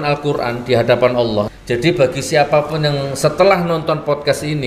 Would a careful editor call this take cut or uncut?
cut